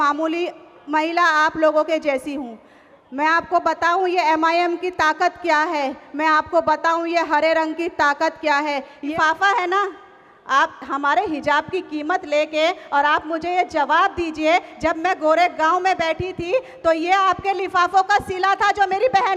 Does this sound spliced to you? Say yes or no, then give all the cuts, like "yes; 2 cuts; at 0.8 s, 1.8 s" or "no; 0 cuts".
yes; 1 cut; at 9.1 s